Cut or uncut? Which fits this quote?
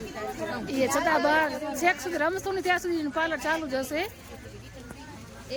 uncut